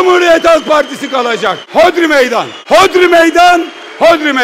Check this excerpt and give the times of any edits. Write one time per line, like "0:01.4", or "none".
0:01.6
0:02.5